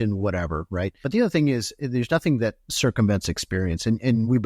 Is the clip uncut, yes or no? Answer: no